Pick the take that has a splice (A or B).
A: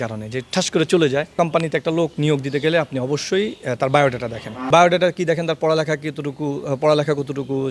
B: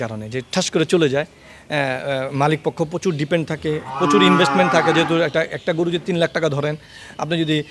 A